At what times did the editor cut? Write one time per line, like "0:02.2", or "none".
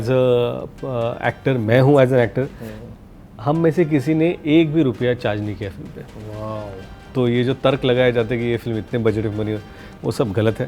0:07.0